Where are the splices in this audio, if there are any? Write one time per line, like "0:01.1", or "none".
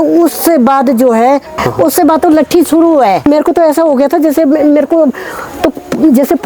0:01.6
0:03.2